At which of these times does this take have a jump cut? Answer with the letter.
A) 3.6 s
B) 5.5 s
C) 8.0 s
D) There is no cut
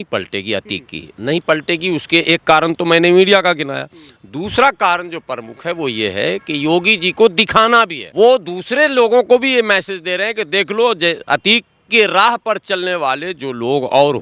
C